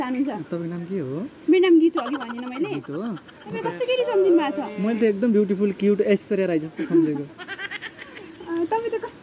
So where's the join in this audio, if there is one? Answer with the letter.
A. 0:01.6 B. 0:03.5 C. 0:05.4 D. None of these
B